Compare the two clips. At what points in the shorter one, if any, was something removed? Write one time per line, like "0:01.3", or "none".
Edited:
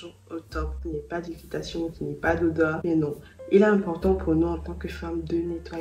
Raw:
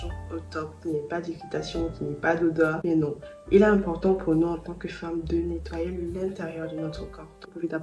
none